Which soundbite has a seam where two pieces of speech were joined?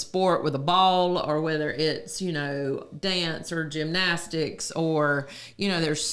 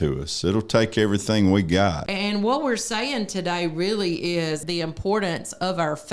second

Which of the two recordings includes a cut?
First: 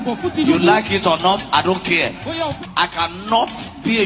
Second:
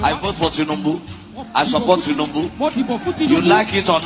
first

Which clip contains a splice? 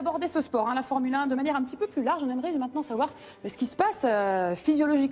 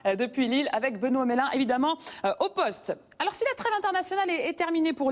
second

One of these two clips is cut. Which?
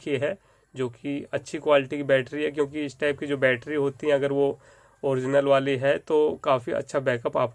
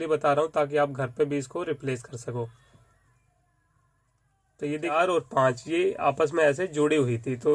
second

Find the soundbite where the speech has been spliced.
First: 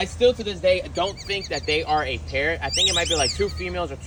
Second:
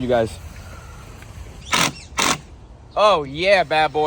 second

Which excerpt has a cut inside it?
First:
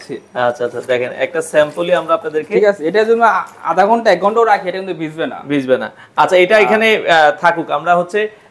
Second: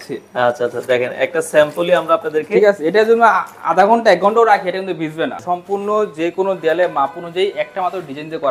second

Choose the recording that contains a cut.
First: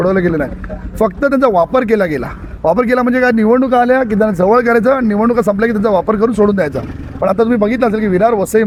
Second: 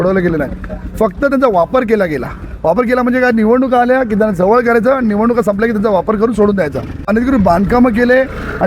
second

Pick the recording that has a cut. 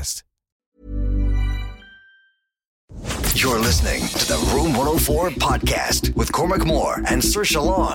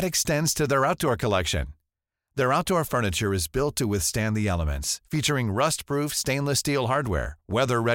first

